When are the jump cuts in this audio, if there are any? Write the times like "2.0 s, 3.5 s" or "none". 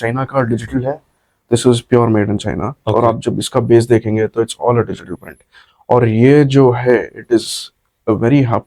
none